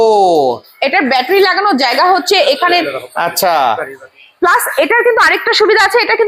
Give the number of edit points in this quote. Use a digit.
0